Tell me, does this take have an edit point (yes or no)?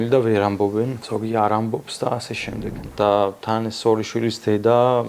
yes